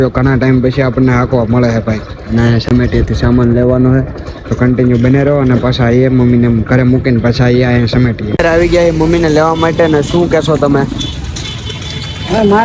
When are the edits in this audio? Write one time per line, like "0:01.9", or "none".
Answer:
none